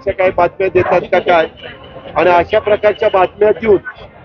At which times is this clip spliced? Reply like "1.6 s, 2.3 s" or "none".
none